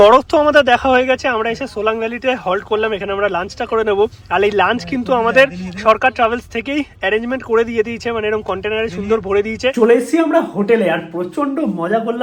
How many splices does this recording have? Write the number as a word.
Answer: zero